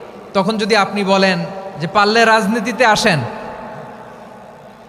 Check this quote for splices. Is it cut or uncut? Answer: uncut